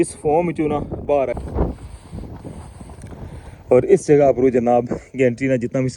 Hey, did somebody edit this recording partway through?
yes; 1 cut; at 1.3 s

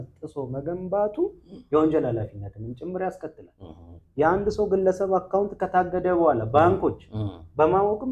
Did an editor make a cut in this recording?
no; 0 cuts

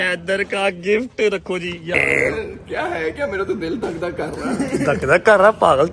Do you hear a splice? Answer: yes; 1 cut; at 1.9 s

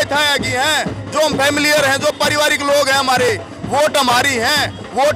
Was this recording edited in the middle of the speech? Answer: no; 0 cuts

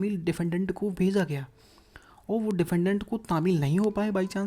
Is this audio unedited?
yes; 0 cuts

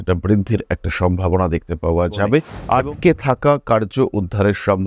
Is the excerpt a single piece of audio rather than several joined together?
no; 1 cut; at 2.5 s

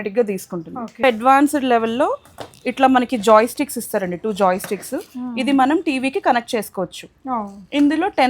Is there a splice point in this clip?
yes; 1 cut; at 1.0 s

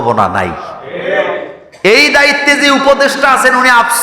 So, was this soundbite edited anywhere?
yes; 1 cut; at 1.6 s

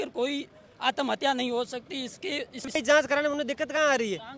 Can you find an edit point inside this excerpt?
yes; 1 cut; at 2.8 s

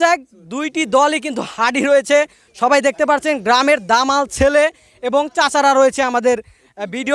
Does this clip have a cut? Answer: no; 0 cuts

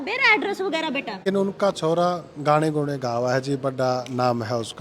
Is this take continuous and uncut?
no; 1 cut; at 1.2 s

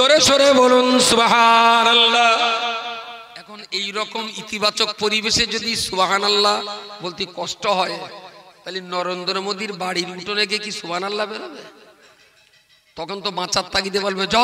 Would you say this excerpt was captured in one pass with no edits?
no; 1 cut; at 3.6 s

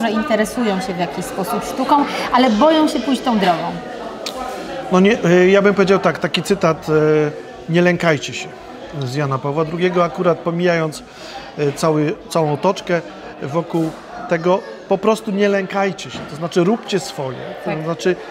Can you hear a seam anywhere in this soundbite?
no; 0 cuts

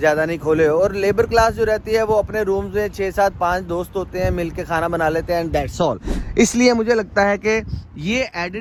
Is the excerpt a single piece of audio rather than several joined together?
yes; 0 cuts

